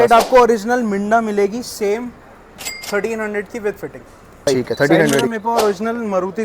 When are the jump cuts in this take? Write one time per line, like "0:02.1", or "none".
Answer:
0:05.3